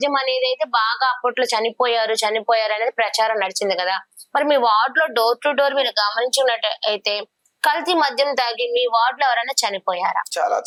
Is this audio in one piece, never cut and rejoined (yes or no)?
yes